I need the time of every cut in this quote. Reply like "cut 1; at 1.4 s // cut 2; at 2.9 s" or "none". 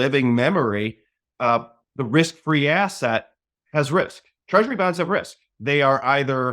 none